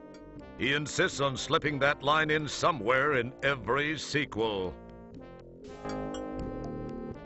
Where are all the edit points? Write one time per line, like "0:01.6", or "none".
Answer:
0:03.6

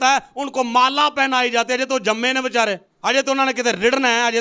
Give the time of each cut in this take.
0:02.9

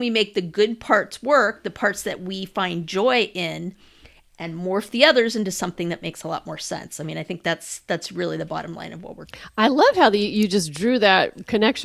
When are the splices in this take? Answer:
none

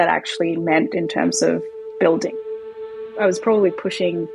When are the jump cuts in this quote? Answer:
0:03.0

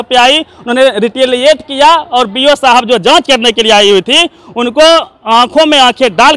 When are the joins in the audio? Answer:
none

